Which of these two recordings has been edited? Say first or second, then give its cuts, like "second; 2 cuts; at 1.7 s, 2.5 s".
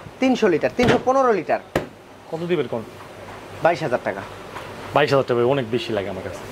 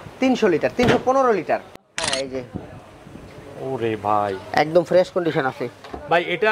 second; 1 cut; at 1.7 s